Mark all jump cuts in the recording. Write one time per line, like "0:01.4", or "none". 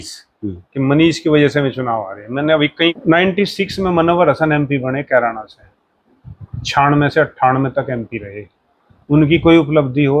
0:02.9